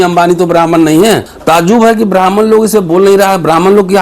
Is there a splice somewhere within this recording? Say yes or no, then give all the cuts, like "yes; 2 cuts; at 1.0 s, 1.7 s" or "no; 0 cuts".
yes; 1 cut; at 1.3 s